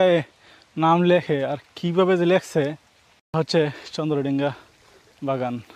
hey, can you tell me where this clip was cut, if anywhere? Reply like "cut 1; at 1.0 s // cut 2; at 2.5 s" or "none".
cut 1; at 3.3 s

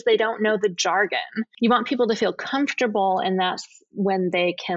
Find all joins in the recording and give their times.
cut 1; at 1.4 s

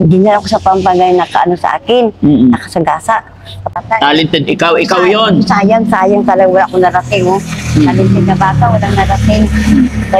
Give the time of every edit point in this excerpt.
cut 1; at 3.8 s

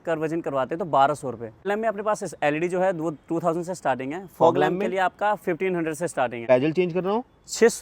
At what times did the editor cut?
cut 1; at 1.6 s // cut 2; at 6.4 s

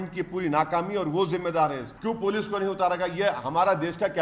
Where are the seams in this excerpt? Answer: cut 1; at 1.9 s

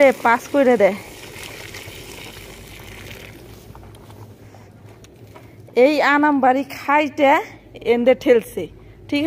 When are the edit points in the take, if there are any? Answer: none

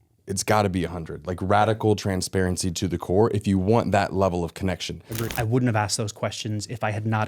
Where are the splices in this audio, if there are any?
cut 1; at 5.2 s

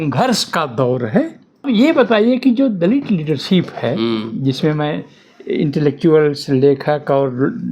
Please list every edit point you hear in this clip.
cut 1; at 1.6 s

